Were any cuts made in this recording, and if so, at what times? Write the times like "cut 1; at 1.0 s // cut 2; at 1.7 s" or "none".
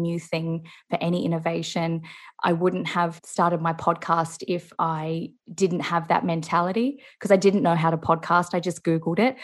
none